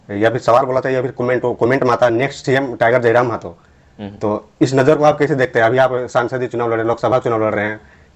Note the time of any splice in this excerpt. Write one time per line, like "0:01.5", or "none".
none